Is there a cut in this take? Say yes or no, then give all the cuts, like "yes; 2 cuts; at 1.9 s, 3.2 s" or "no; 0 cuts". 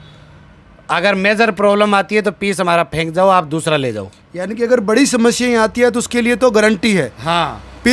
no; 0 cuts